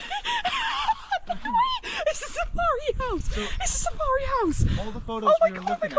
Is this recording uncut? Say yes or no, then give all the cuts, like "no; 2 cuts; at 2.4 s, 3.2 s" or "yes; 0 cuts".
yes; 0 cuts